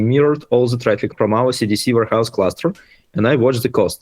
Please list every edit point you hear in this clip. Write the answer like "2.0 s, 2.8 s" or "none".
1.1 s